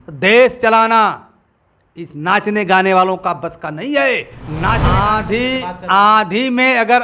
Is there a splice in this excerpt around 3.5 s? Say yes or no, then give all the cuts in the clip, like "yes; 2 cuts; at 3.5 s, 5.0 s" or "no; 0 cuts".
no; 1 cut; at 4.9 s